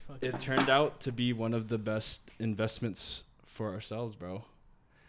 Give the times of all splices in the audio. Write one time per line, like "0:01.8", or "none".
none

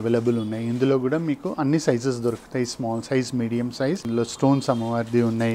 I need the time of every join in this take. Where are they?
0:04.0

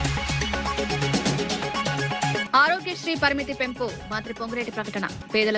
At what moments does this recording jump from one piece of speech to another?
0:02.5

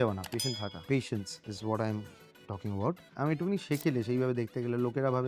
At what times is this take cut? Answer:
0:03.1

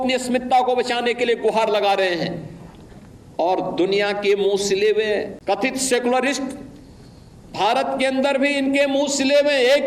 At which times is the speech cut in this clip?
0:05.3

